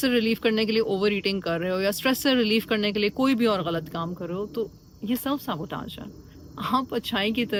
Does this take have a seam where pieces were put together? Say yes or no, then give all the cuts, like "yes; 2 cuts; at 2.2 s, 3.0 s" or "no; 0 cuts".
no; 0 cuts